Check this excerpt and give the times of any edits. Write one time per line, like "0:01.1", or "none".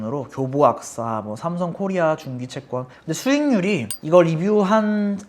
0:02.9

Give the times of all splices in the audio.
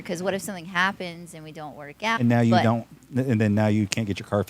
0:02.2

